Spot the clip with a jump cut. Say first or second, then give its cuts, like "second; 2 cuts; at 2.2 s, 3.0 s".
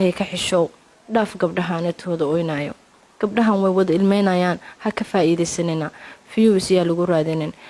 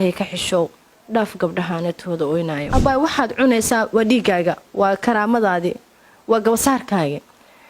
second; 1 cut; at 2.7 s